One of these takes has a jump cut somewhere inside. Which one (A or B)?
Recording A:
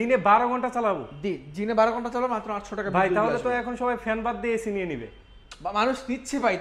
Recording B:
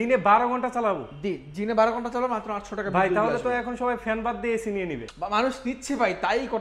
B